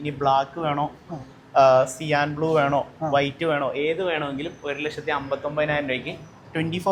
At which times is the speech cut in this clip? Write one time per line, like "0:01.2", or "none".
none